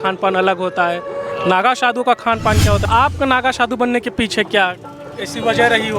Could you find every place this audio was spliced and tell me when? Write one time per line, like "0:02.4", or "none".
0:02.8